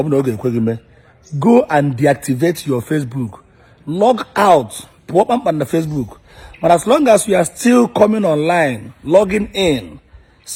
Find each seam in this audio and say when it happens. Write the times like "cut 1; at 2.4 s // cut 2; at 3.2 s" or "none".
none